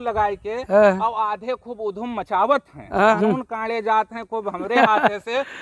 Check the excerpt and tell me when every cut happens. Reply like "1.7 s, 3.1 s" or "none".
3.1 s

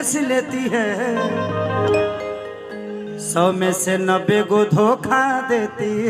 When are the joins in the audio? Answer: 1.9 s

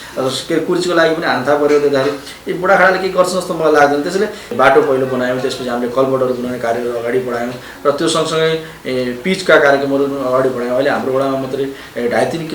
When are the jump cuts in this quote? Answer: 4.4 s, 7.7 s

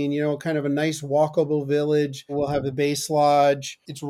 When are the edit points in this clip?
2.3 s

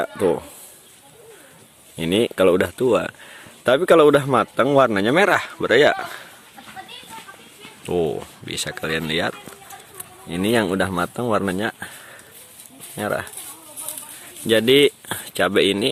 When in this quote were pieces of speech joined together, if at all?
none

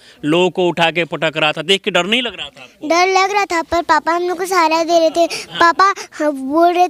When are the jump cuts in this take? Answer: none

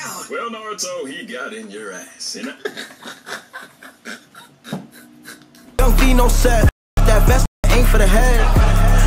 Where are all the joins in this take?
5.8 s

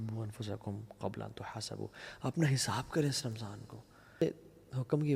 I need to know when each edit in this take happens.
4.2 s

